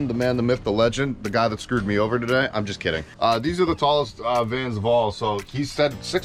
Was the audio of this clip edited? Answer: yes; 1 cut; at 3.1 s

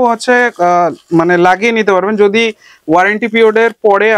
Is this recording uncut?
yes; 0 cuts

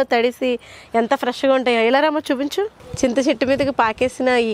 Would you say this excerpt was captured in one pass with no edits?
no; 1 cut; at 2.8 s

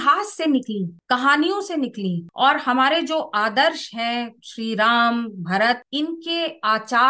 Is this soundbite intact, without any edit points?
yes; 0 cuts

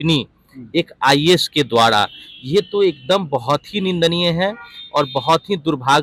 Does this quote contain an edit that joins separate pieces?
no; 0 cuts

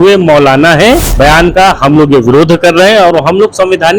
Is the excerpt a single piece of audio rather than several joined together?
no; 1 cut; at 1.1 s

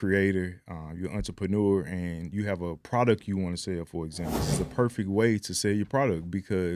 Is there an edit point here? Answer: yes; 1 cut; at 4.5 s

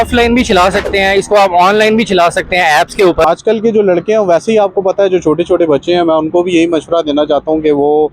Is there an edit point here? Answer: yes; 1 cut; at 3.2 s

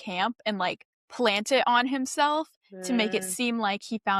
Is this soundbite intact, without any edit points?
yes; 0 cuts

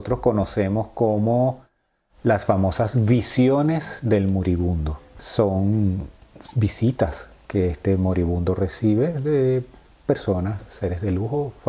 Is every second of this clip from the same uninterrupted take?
no; 1 cut; at 5.2 s

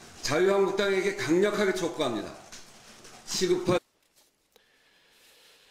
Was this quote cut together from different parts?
no; 0 cuts

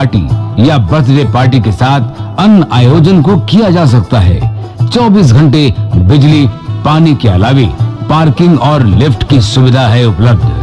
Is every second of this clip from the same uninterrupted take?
yes; 0 cuts

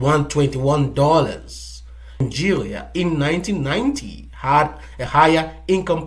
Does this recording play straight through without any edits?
no; 1 cut; at 2.2 s

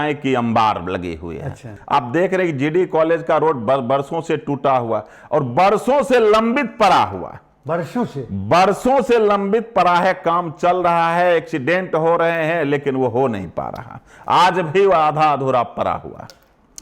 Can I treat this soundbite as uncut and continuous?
no; 1 cut; at 1.8 s

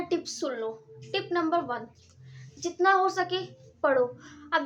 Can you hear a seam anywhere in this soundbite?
no; 0 cuts

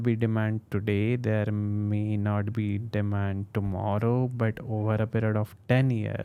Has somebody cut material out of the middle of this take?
no; 0 cuts

